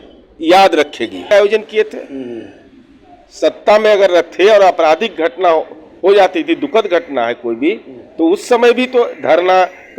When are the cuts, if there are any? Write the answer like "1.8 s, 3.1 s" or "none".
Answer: 1.3 s